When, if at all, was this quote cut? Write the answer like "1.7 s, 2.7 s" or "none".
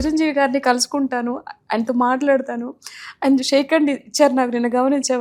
none